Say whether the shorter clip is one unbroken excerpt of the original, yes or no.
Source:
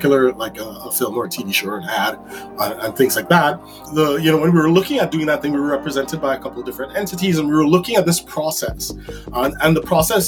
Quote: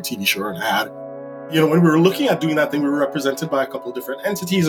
no